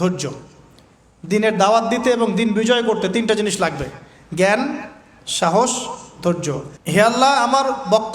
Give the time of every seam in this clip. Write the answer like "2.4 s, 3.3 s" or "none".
6.7 s